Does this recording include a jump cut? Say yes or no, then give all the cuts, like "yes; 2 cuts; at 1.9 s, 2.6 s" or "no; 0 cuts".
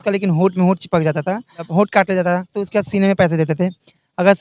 yes; 2 cuts; at 1.6 s, 2.6 s